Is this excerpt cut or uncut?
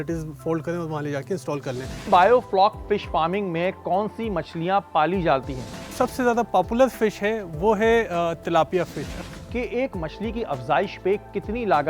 cut